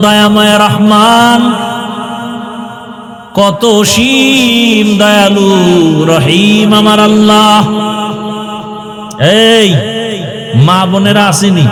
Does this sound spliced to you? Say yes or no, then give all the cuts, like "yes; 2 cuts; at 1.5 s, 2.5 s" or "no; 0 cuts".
no; 0 cuts